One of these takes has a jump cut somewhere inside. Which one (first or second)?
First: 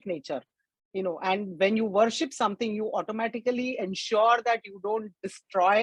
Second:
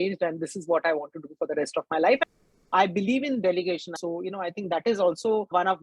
second